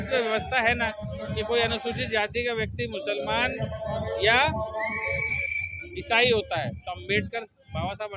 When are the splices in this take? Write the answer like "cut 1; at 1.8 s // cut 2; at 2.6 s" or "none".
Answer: none